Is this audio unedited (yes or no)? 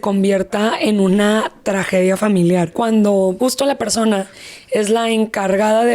no